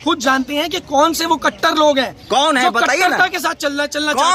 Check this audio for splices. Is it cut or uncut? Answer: uncut